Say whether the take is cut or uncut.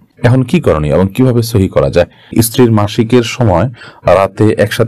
cut